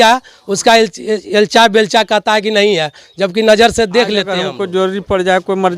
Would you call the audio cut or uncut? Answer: cut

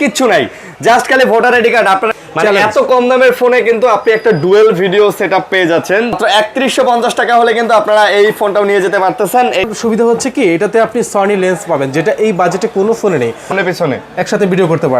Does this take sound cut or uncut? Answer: cut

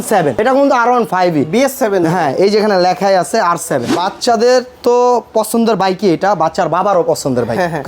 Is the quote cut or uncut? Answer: cut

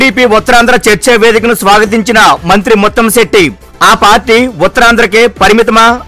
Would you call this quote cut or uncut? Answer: uncut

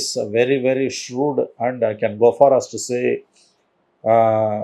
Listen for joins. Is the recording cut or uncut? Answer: uncut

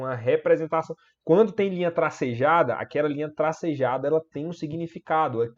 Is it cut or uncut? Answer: uncut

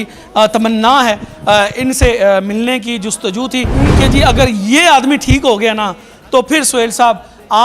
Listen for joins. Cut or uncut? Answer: uncut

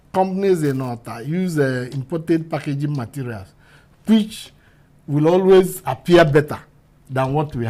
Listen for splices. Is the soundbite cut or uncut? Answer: uncut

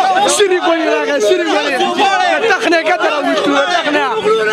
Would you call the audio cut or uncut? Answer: uncut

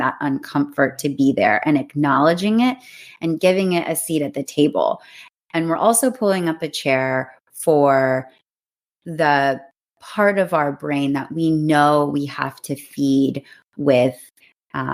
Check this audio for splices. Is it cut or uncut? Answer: uncut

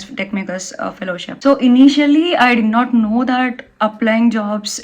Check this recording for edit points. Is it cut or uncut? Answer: cut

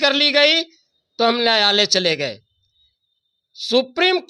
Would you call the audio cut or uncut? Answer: uncut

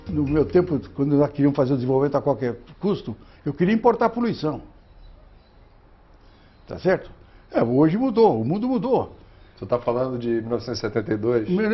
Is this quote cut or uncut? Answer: uncut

